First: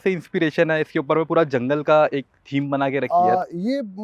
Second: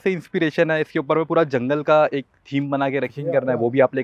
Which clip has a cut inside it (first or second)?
second